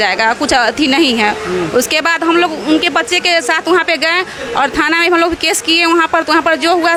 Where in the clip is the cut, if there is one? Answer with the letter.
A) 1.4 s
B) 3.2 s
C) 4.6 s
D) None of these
D